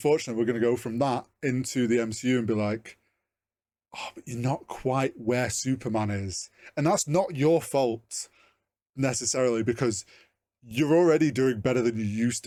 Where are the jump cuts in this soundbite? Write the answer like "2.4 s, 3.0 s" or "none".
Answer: none